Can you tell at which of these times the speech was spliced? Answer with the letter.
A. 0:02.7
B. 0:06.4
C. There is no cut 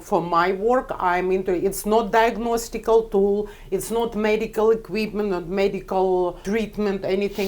B